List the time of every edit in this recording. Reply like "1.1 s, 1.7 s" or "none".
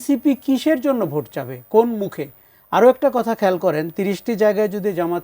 none

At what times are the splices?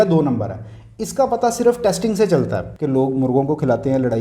2.7 s

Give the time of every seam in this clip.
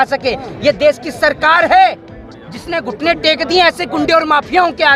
none

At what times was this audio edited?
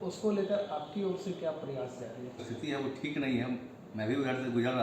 2.5 s

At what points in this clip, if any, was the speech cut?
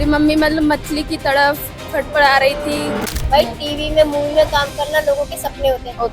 3.1 s

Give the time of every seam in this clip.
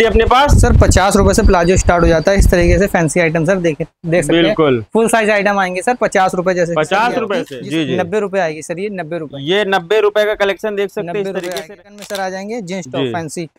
7.5 s, 11.7 s

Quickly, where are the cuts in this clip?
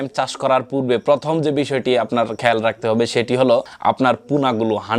3.7 s

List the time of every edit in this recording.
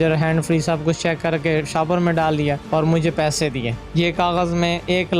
2.6 s, 3.8 s

